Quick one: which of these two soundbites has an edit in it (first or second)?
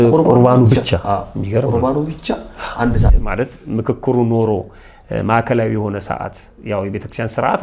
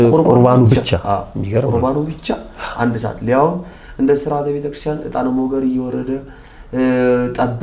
first